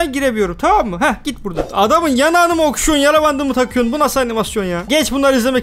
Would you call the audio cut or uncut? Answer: cut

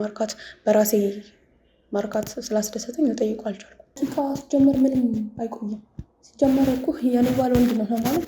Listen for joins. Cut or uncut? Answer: cut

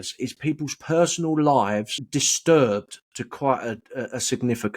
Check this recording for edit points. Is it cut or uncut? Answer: cut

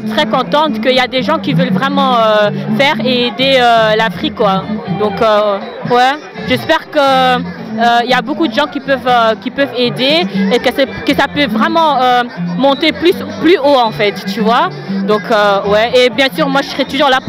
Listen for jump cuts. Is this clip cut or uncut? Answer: uncut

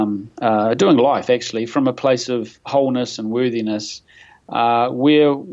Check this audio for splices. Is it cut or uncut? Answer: uncut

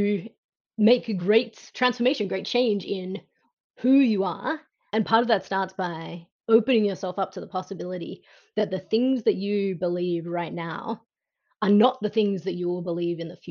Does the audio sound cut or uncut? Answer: cut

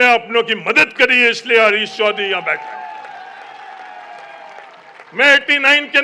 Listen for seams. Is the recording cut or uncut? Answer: uncut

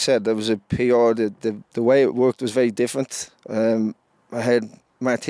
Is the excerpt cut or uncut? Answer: uncut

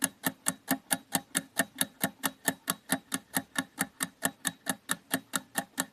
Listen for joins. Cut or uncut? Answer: uncut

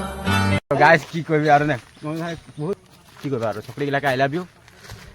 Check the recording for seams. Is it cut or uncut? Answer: cut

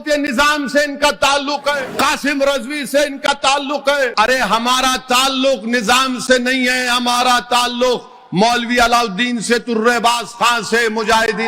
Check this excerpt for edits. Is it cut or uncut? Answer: cut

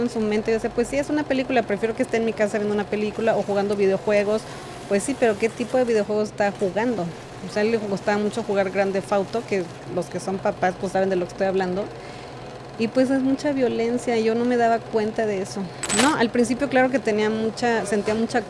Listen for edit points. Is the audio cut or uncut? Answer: cut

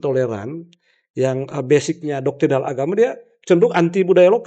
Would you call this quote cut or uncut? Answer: uncut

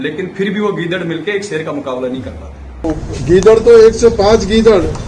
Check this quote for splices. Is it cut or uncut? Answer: cut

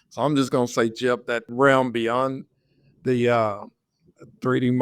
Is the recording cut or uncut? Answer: cut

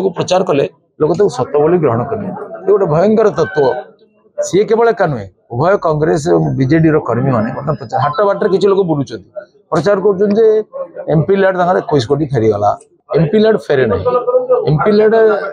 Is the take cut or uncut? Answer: cut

